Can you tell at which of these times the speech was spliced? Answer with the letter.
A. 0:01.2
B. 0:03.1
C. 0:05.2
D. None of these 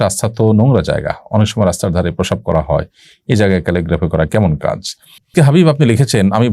C